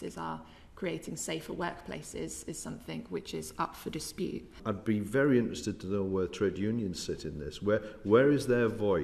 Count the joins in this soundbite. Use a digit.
1